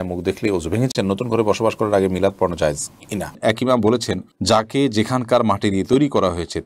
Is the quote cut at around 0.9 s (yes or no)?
yes